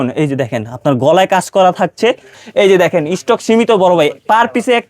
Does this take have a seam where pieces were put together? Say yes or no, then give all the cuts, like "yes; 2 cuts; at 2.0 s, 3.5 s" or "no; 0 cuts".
yes; 1 cut; at 2.4 s